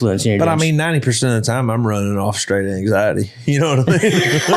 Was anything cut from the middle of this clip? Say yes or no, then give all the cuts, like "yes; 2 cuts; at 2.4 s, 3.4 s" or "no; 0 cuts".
no; 0 cuts